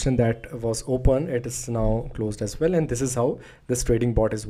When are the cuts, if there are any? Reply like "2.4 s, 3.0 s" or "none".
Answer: none